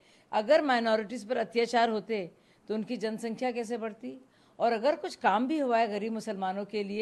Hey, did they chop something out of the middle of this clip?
no; 0 cuts

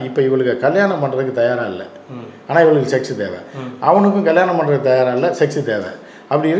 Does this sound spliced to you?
no; 0 cuts

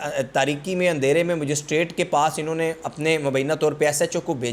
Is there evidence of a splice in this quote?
no; 0 cuts

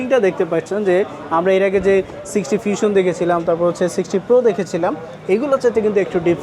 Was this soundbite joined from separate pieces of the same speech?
no; 0 cuts

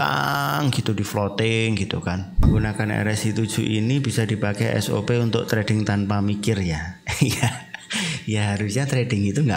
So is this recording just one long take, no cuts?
no; 1 cut; at 2.5 s

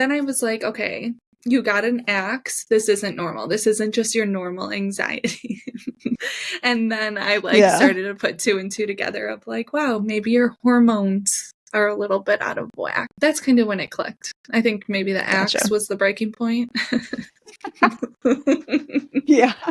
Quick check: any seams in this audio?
yes; 2 cuts; at 6.2 s, 13.1 s

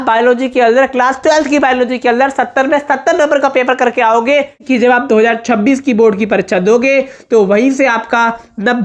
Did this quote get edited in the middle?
yes; 1 cut; at 4.6 s

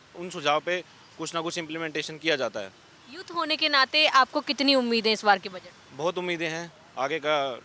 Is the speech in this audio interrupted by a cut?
no; 0 cuts

